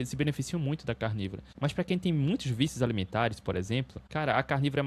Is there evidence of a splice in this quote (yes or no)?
yes